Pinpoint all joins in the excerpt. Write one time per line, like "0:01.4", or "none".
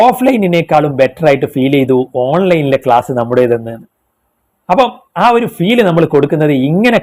none